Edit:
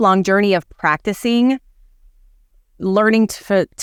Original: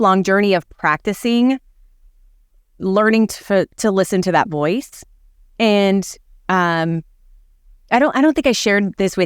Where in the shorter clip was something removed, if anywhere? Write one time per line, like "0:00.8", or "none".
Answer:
none